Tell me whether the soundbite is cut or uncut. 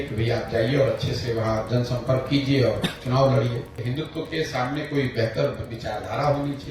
cut